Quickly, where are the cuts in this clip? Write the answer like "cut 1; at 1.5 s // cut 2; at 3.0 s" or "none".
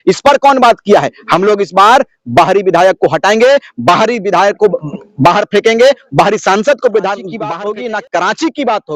cut 1; at 7.3 s